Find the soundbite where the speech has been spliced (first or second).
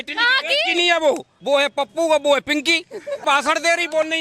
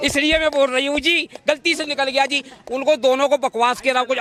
first